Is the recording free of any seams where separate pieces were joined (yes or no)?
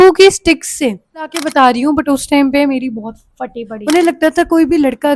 no